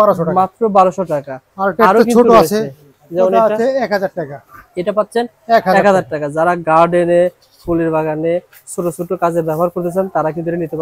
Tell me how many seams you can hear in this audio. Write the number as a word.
zero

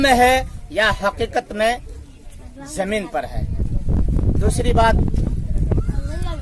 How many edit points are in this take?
zero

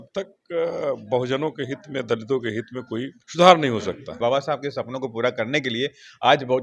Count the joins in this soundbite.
two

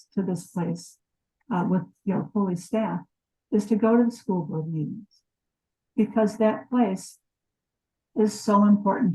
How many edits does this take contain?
one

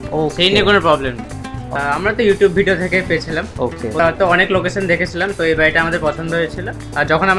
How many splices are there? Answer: two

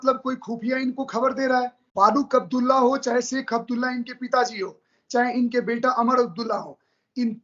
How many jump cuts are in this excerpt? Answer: one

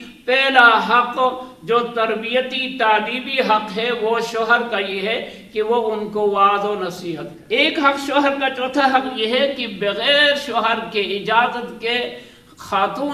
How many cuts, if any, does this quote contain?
one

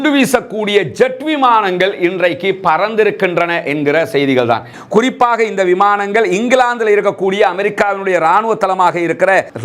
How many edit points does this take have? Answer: one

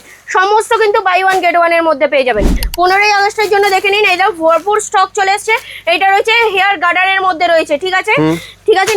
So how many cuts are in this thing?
one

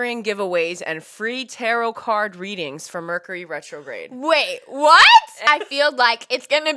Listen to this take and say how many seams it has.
one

